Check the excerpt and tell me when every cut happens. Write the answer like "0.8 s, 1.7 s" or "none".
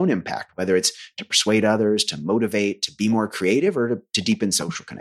none